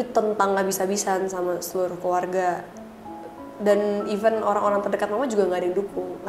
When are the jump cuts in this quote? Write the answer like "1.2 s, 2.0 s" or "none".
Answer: none

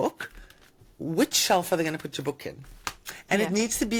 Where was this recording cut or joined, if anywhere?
none

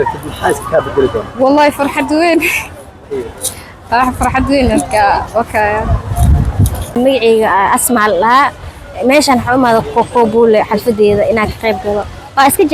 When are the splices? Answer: 7.0 s

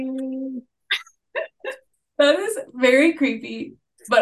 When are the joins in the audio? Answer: 2.0 s

